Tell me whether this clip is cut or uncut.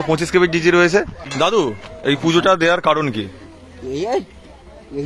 cut